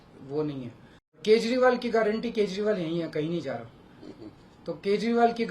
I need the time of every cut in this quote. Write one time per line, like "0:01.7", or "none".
0:01.2